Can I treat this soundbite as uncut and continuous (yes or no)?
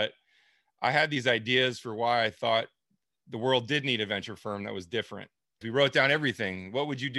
no